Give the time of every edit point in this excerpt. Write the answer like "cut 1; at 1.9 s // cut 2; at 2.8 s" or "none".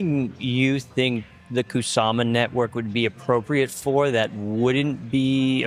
none